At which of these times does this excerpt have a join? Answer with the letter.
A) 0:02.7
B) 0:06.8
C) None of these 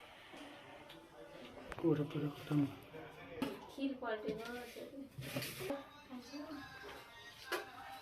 C